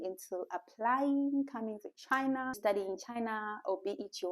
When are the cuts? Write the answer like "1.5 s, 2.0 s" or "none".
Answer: 2.6 s

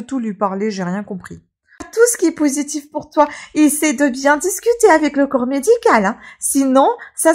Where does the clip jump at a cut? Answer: 1.9 s

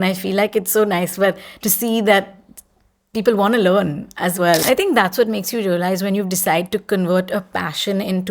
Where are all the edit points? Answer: 4.6 s

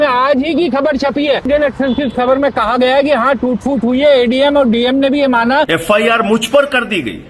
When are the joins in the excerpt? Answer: 1.5 s, 5.7 s

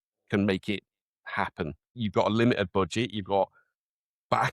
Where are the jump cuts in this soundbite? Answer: 2.0 s

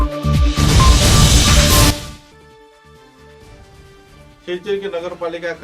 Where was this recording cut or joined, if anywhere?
3.2 s

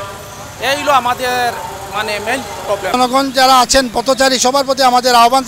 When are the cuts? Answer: 2.9 s

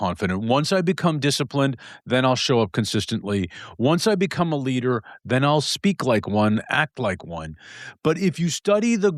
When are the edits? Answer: none

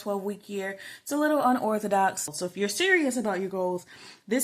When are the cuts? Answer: 2.3 s

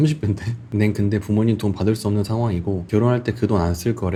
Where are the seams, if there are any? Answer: none

